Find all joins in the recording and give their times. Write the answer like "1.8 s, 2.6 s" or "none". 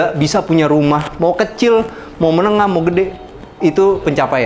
none